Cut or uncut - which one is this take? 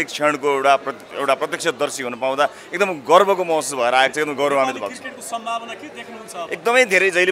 uncut